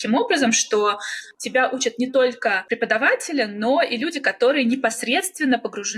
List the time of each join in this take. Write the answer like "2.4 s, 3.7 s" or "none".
none